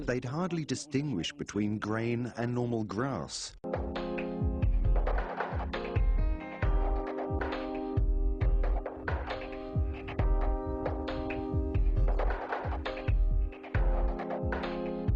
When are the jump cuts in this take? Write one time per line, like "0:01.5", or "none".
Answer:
none